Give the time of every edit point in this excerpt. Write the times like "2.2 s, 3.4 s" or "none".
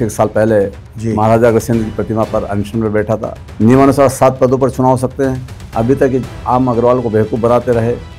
3.4 s